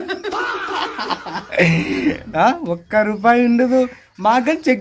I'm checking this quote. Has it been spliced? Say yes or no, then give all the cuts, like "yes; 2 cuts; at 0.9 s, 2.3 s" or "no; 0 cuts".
no; 0 cuts